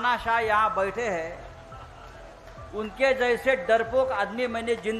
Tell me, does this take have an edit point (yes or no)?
no